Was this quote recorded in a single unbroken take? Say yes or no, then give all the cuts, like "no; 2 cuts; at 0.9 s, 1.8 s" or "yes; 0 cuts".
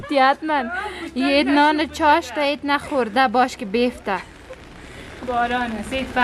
yes; 0 cuts